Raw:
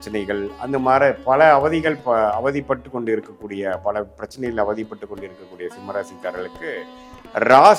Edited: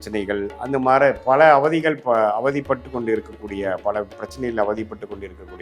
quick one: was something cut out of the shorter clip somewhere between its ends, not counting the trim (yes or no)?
no